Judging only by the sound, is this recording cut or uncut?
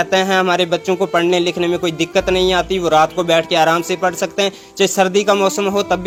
uncut